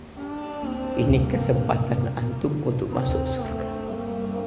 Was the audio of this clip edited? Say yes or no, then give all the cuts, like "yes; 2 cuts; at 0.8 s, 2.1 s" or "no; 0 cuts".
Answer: no; 0 cuts